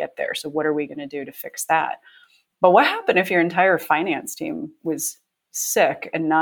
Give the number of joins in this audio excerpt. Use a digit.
1